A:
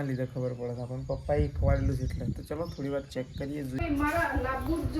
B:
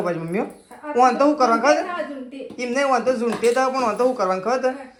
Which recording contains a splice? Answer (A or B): A